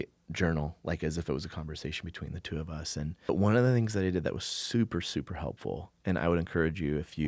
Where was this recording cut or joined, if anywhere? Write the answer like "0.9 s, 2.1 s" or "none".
3.3 s